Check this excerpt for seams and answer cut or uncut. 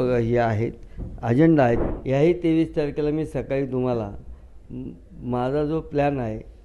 cut